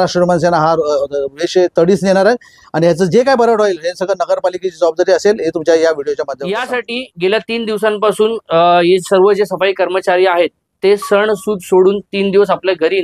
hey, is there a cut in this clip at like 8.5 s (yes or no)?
no